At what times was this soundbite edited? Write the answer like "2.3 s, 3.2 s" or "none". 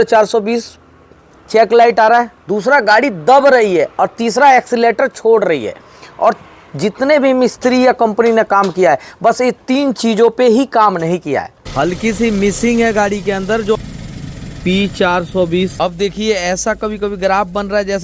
11.6 s, 13.8 s, 15.7 s